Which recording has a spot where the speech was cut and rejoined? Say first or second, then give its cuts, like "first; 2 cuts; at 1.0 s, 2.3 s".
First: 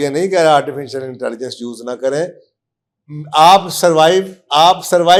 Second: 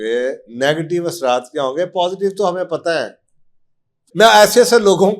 second; 1 cut; at 4.0 s